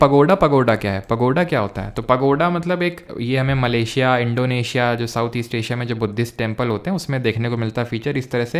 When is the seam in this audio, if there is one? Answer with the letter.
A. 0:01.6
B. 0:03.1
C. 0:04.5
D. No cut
B